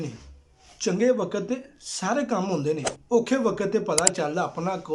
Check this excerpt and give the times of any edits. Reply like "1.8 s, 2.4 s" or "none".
none